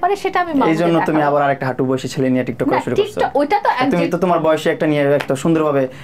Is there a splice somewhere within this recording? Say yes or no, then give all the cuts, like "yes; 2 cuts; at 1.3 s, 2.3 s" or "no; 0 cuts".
no; 0 cuts